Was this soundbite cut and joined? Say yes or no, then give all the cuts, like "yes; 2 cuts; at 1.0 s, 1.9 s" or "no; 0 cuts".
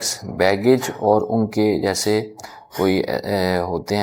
no; 0 cuts